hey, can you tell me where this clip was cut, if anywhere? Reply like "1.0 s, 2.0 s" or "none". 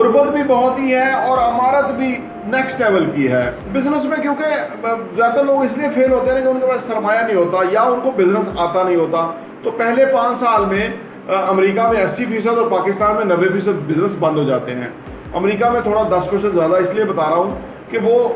3.6 s